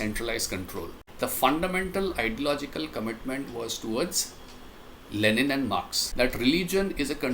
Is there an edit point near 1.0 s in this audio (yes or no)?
yes